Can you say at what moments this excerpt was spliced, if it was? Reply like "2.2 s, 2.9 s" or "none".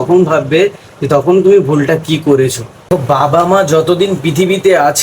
2.9 s